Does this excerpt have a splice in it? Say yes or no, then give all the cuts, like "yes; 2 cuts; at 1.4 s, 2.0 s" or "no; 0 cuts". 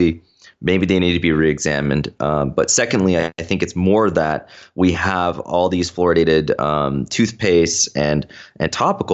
no; 0 cuts